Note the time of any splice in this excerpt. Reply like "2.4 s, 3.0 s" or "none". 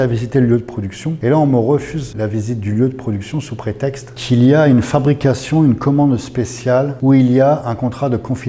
1.1 s, 2.0 s, 4.1 s, 6.9 s